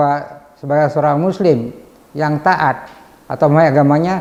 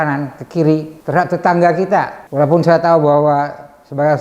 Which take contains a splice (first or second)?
second